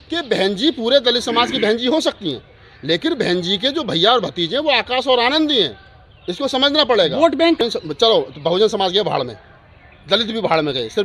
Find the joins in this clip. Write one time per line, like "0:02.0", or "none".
0:07.6